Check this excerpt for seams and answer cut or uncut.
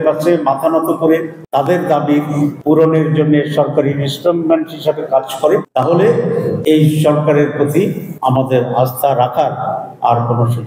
cut